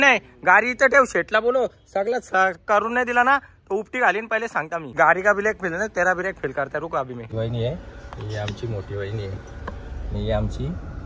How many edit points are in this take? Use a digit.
2